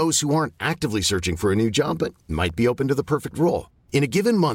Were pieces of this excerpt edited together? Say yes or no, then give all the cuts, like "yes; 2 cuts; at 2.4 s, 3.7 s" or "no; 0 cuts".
no; 0 cuts